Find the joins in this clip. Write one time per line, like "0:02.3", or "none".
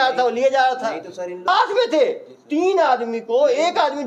0:01.5